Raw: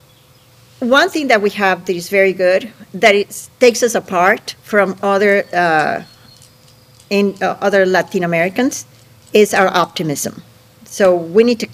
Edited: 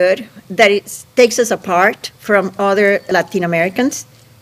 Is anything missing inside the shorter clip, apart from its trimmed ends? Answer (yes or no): yes